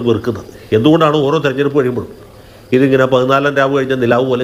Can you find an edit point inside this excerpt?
no; 0 cuts

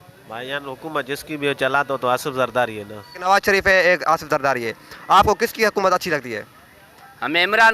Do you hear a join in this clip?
yes; 1 cut; at 3.2 s

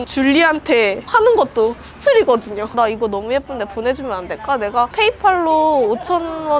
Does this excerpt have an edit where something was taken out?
yes; 2 cuts; at 2.6 s, 4.9 s

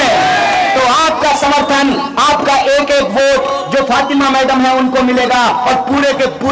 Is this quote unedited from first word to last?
yes; 0 cuts

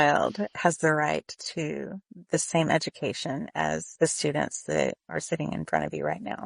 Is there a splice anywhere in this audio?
yes; 2 cuts; at 3.9 s, 5.0 s

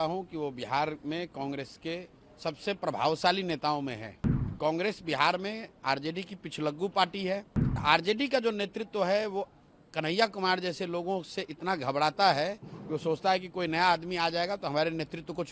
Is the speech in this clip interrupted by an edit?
yes; 2 cuts; at 4.5 s, 7.8 s

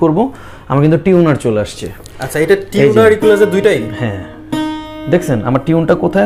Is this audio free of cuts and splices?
yes; 0 cuts

